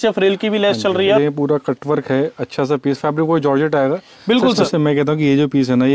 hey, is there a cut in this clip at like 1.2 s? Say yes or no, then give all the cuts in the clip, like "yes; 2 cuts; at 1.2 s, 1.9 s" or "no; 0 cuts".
yes; 2 cuts; at 1.2 s, 4.6 s